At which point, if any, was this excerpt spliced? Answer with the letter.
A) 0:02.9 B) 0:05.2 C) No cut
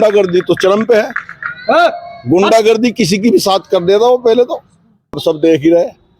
B